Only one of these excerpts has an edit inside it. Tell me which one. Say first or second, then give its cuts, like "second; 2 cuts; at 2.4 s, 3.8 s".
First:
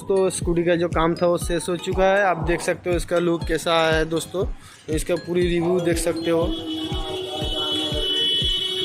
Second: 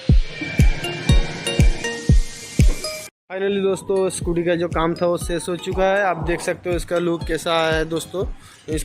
second; 2 cuts; at 1.1 s, 2.8 s